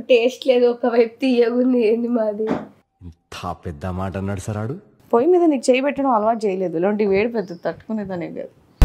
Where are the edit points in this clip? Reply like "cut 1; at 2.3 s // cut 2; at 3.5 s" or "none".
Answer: cut 1; at 4.9 s